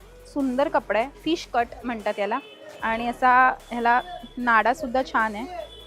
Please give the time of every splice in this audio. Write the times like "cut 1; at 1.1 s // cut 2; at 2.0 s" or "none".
none